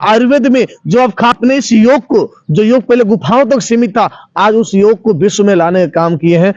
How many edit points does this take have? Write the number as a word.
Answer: one